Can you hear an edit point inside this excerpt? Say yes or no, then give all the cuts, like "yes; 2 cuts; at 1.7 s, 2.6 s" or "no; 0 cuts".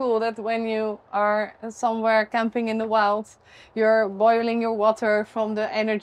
no; 0 cuts